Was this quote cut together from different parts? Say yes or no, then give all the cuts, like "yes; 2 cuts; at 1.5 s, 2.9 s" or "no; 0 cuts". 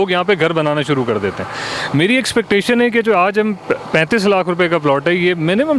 no; 0 cuts